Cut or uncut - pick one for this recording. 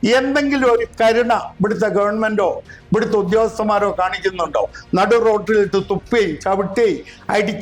uncut